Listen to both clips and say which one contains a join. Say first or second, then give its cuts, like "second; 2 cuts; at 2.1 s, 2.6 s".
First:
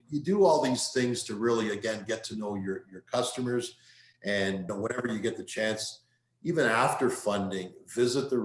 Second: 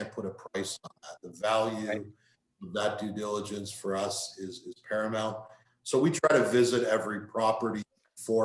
first; 1 cut; at 4.7 s